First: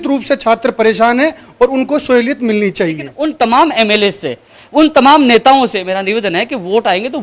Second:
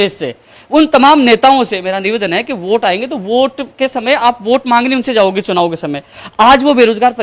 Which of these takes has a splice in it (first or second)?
first